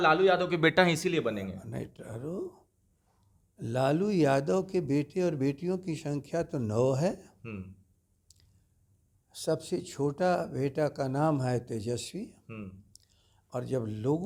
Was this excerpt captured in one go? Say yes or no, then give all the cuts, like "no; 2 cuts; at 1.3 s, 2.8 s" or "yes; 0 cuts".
yes; 0 cuts